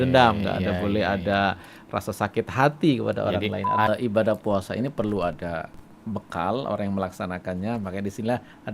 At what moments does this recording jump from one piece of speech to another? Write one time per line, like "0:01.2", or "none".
0:03.9